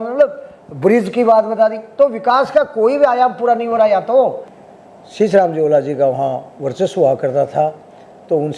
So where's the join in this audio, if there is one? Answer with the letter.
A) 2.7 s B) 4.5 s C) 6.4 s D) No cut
B